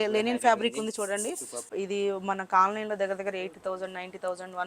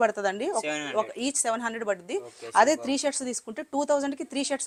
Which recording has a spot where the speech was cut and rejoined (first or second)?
first